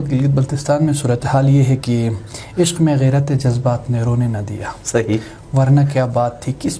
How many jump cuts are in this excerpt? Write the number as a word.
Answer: zero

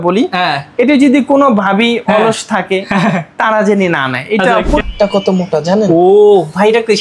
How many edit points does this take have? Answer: one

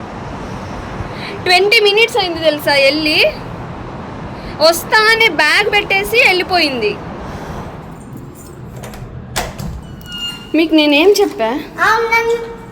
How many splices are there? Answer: one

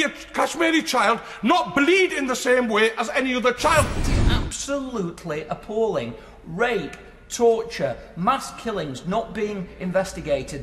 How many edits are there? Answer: one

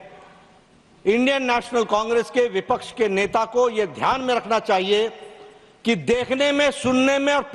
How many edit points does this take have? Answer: zero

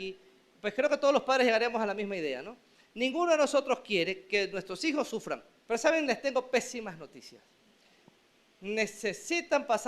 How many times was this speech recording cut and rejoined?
one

